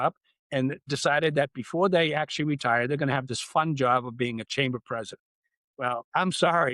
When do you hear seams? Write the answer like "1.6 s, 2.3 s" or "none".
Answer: 5.8 s